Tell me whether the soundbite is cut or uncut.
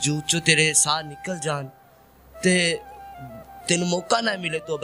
uncut